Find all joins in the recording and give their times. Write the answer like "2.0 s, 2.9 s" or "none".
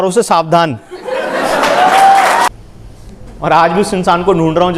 2.5 s